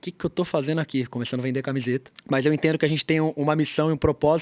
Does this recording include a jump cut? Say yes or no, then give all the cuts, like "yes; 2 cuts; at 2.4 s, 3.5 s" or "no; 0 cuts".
yes; 1 cut; at 2.1 s